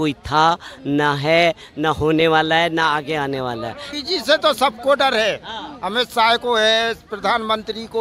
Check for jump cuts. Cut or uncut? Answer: cut